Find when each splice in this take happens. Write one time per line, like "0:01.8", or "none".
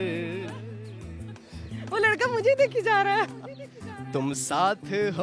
none